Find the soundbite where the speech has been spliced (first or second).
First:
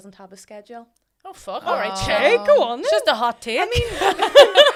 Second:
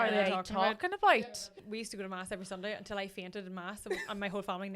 second